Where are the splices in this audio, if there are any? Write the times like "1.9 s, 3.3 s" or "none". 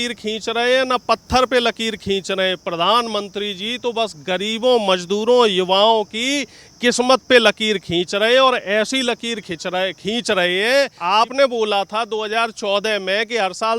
11.0 s